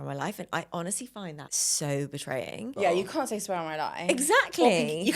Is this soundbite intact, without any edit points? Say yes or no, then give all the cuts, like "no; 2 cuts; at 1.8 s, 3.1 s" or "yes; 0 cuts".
no; 2 cuts; at 1.5 s, 2.7 s